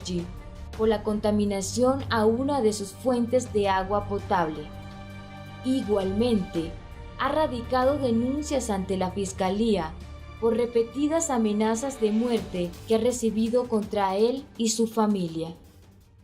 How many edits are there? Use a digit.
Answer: 1